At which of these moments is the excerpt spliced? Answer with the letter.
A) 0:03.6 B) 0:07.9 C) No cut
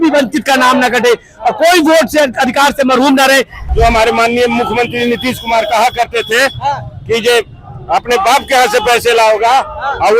A